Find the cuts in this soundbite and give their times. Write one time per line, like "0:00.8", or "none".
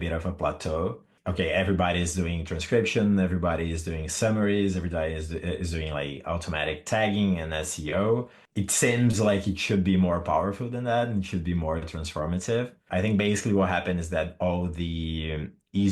0:01.1
0:08.4

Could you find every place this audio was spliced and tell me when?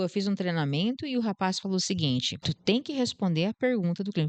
0:02.3

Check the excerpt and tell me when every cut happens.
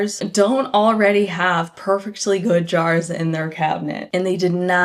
none

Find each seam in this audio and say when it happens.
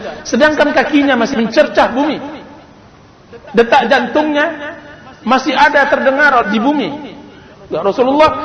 0:01.3
0:07.5

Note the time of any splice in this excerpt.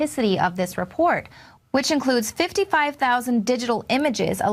0:02.6

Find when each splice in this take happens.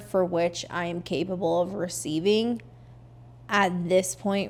none

